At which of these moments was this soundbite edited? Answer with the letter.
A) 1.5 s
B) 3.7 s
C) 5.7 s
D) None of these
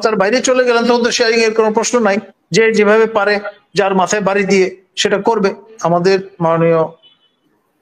C